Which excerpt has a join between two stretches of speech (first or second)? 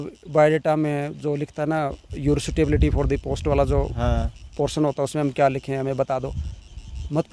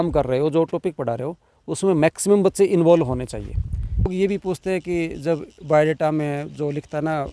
second